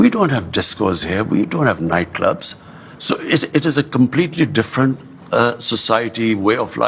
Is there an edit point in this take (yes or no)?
no